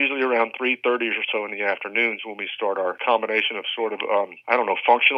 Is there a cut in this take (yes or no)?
yes